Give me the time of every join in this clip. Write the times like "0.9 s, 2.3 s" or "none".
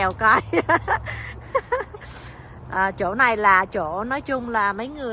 none